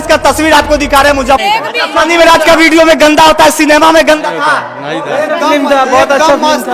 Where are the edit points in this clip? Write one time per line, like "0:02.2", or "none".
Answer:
0:01.4